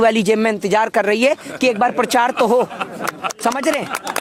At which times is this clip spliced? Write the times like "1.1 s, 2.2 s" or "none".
none